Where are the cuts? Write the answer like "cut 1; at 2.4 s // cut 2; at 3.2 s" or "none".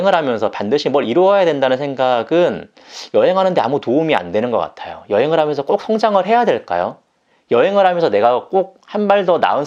none